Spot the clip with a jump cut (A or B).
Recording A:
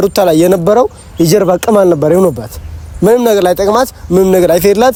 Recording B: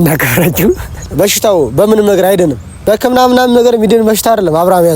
B